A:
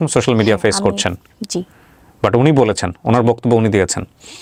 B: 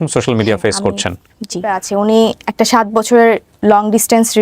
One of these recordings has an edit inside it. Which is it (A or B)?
B